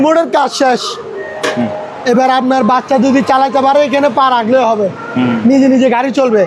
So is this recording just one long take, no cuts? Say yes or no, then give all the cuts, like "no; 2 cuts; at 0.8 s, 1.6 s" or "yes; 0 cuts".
yes; 0 cuts